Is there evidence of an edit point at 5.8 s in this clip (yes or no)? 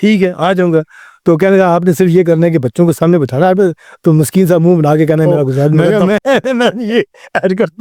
yes